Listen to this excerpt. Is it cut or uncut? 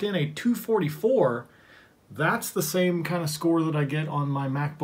uncut